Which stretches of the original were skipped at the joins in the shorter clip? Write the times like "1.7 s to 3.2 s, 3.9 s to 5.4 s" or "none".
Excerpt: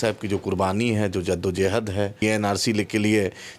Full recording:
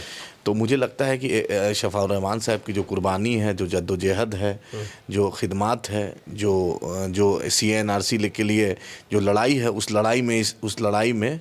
4.6 s to 7.6 s